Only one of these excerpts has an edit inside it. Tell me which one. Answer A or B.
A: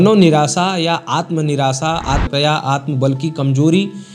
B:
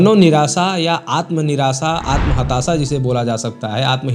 A